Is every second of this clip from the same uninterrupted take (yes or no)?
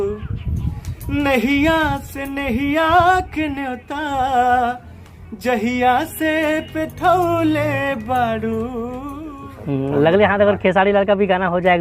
no